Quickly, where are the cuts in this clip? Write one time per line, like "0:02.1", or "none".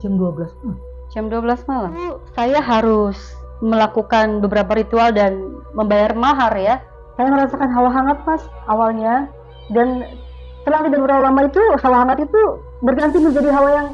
0:02.2
0:07.0